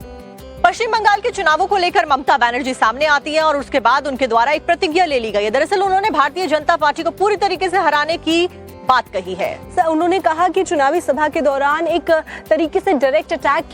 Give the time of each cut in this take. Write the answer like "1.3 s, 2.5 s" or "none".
none